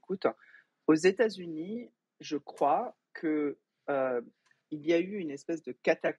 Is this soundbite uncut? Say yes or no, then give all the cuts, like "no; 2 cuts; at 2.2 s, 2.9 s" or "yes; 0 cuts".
yes; 0 cuts